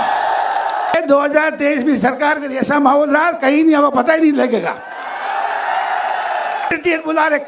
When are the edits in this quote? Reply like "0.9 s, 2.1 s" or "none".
0.9 s, 6.7 s